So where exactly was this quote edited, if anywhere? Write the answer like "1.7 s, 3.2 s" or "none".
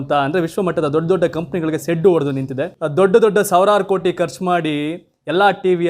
none